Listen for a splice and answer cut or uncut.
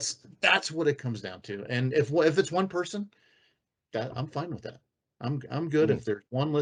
uncut